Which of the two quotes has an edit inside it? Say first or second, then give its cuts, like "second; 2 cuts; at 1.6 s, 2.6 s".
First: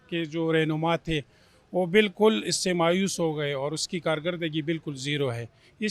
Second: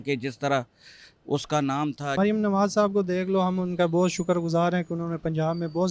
second; 1 cut; at 2.2 s